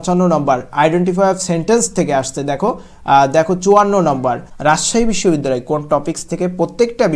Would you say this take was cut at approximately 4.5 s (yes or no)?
yes